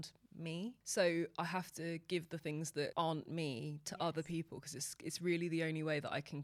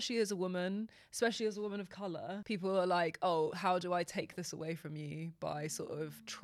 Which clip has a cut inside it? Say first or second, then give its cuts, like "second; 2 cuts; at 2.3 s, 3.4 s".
second; 1 cut; at 2.4 s